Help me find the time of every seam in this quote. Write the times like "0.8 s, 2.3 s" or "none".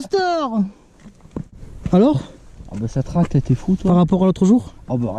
1.5 s

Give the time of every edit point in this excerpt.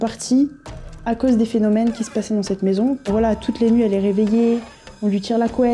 3.1 s

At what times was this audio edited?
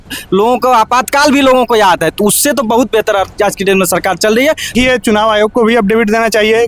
4.7 s

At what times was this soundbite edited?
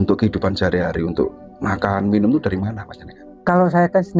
none

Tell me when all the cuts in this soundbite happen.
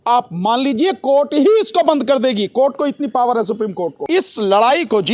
4.0 s

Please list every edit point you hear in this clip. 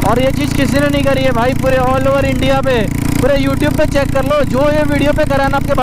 none

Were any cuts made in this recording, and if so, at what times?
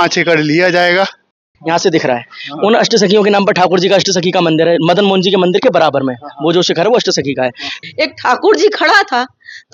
1.5 s, 7.7 s

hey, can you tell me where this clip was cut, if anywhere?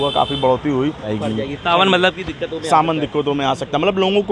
1.1 s

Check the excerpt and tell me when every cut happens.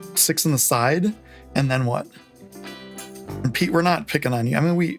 none

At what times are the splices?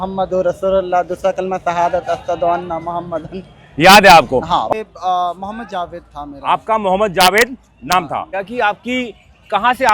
4.7 s, 8.3 s

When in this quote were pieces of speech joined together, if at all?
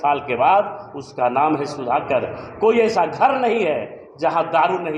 none

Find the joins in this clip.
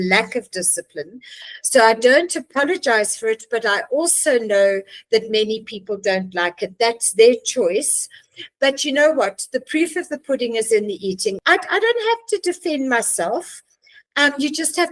11.4 s

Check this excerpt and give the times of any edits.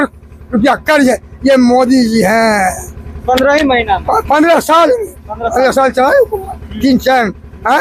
none

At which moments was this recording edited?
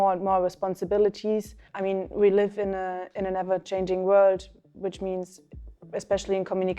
1.6 s

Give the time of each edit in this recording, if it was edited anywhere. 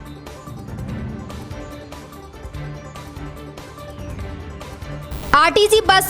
2.5 s

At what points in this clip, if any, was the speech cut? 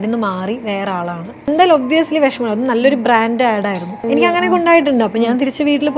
1.5 s, 3.9 s

